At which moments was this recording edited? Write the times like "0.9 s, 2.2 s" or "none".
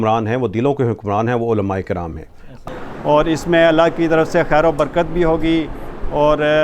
2.5 s